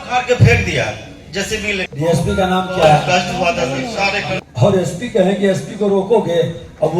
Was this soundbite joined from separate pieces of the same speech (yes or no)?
yes